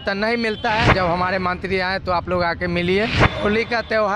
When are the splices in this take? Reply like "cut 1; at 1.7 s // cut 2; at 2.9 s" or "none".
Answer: cut 1; at 0.9 s // cut 2; at 3.2 s